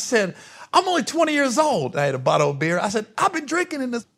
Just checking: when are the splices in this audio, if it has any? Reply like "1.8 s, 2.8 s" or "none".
none